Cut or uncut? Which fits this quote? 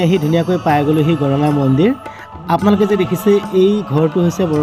uncut